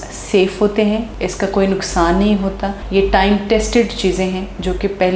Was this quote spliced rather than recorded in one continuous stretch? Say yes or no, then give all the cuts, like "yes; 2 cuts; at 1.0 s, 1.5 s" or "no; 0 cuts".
no; 0 cuts